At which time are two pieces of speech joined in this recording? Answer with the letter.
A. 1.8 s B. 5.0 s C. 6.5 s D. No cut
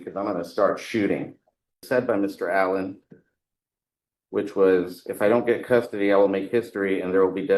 A